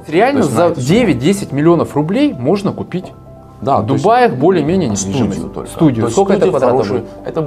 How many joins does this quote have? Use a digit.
0